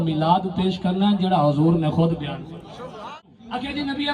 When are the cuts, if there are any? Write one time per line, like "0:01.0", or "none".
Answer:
0:03.2